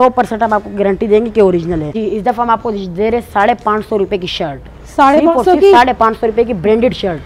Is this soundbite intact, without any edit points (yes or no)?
no